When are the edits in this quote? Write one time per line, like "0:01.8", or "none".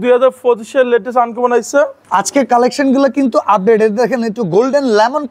0:02.0